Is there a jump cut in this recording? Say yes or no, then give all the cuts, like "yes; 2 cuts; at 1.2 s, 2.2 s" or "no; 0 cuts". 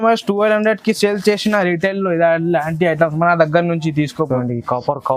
no; 0 cuts